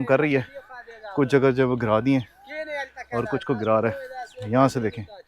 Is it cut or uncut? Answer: uncut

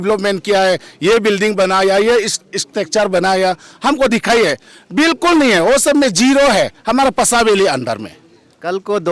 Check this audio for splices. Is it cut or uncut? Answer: uncut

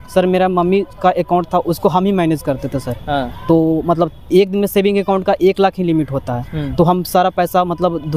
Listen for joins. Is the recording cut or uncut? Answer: uncut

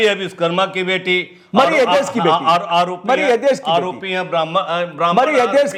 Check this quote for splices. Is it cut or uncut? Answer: uncut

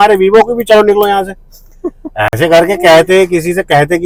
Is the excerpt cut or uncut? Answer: uncut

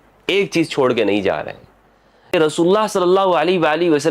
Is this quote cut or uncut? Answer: cut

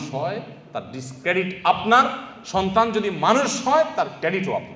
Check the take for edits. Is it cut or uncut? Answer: uncut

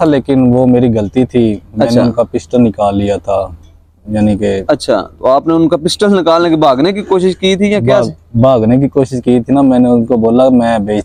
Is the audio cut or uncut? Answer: uncut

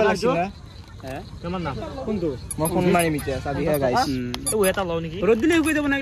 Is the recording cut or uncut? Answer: uncut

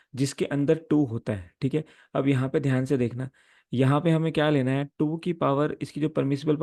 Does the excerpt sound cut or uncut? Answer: uncut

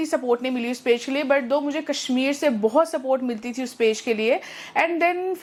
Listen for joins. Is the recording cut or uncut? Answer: uncut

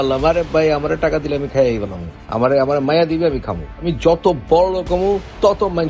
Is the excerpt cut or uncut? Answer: uncut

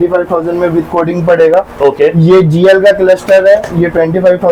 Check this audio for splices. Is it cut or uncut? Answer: uncut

